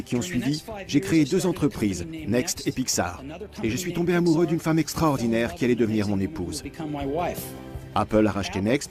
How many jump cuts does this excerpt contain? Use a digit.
1